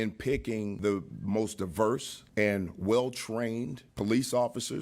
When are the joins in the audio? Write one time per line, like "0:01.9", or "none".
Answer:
0:00.8
0:02.2
0:03.8